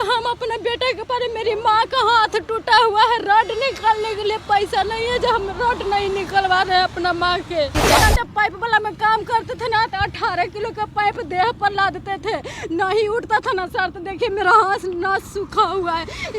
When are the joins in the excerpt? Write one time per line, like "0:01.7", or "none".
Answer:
0:08.0